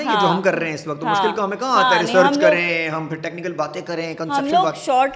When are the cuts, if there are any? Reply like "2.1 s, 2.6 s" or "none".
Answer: none